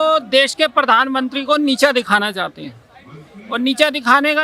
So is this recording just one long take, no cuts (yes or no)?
yes